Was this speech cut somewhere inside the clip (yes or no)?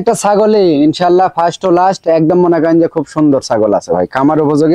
no